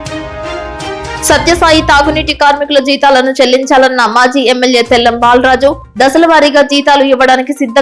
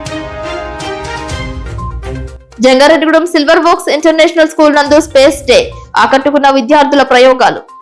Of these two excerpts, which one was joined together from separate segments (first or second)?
first